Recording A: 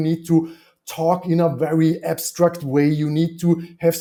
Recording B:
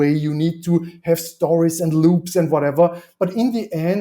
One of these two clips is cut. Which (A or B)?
B